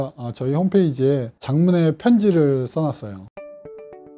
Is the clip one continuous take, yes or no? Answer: no